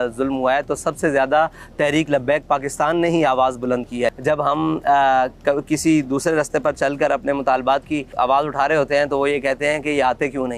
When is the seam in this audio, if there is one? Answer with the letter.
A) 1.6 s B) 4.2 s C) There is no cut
B